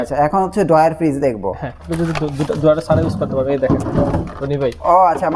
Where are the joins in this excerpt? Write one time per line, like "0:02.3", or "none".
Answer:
0:01.9